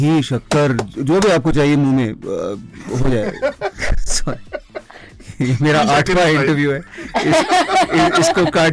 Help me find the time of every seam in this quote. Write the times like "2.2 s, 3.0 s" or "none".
none